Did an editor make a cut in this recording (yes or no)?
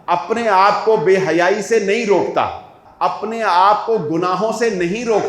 yes